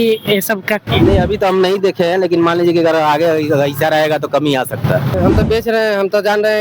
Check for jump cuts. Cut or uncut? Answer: cut